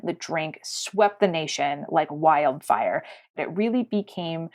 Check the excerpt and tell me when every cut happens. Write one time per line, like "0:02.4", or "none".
0:03.3